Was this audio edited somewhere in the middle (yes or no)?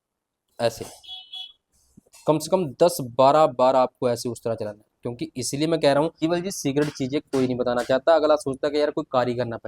yes